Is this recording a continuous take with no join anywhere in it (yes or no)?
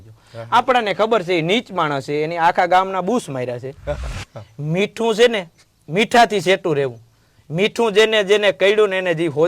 no